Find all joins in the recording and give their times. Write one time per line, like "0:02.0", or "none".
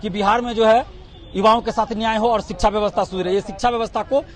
none